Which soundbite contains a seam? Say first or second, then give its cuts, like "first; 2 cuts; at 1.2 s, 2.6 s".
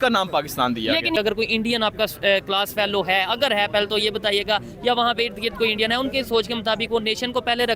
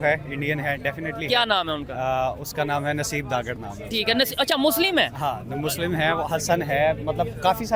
first; 1 cut; at 1.1 s